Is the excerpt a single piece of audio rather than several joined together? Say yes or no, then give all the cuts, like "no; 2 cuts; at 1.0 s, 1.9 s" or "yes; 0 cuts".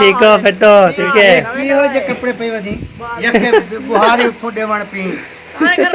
no; 1 cut; at 1.1 s